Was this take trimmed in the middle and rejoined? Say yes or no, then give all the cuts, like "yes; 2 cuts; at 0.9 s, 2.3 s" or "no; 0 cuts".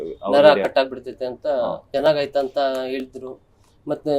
yes; 1 cut; at 1.8 s